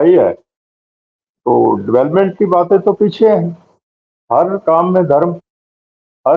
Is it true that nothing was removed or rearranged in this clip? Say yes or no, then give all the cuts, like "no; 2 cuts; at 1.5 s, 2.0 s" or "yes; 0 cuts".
yes; 0 cuts